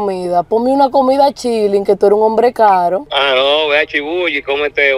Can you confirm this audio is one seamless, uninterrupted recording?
no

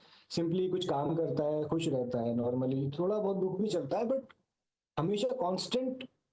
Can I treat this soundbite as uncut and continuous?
yes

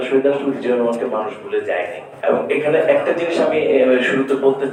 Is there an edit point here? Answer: no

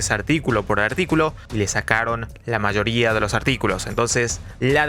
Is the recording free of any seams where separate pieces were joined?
yes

